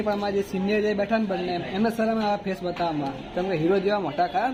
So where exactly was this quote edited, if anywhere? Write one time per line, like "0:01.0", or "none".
none

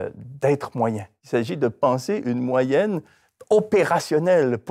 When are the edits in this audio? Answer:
0:01.2

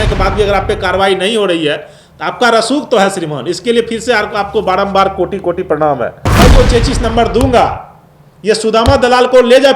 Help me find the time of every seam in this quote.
0:06.3

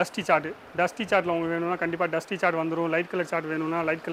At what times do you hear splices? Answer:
none

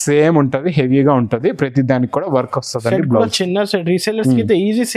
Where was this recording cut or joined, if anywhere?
none

